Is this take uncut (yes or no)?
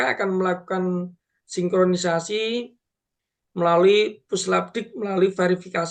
yes